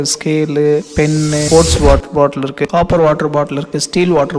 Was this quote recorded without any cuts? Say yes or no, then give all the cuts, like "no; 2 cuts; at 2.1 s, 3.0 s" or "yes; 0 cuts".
no; 1 cut; at 1.4 s